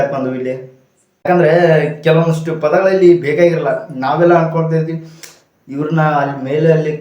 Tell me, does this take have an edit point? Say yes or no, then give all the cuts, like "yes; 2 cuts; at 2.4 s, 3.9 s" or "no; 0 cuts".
yes; 1 cut; at 1.3 s